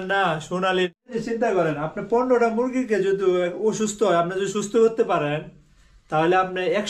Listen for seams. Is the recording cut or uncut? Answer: cut